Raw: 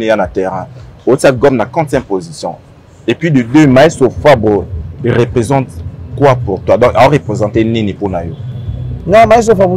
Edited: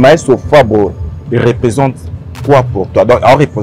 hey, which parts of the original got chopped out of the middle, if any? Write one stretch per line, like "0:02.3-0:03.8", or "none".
none

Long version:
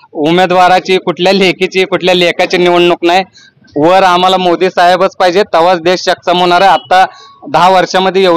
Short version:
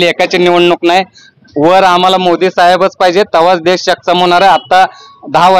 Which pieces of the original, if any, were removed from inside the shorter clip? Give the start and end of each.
none

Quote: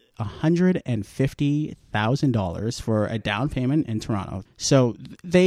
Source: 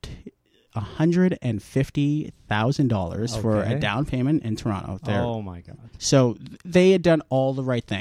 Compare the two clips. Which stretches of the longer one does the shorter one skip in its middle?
0:04.9-0:05.8

